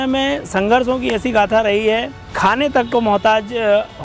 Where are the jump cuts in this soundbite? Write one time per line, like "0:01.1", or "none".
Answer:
0:02.2